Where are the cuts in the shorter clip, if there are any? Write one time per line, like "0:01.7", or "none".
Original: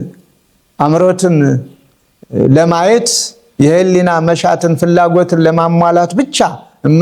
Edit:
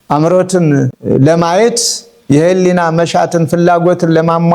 0:01.0